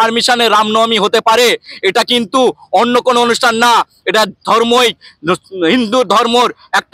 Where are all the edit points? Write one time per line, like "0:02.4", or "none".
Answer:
none